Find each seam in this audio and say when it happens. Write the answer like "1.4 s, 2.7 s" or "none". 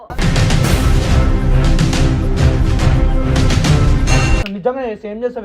4.4 s